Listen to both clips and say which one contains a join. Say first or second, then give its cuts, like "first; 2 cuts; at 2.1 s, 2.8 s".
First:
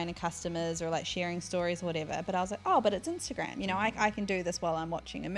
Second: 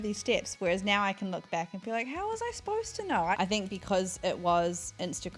second; 1 cut; at 3.3 s